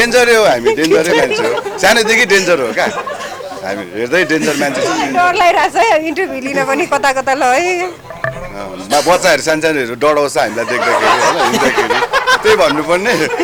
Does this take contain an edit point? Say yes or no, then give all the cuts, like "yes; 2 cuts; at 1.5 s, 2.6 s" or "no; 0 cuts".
no; 0 cuts